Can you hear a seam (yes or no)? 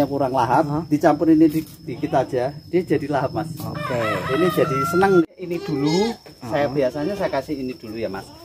yes